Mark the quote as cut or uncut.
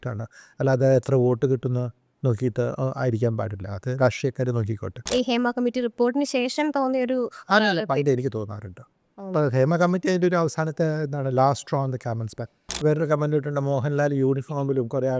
cut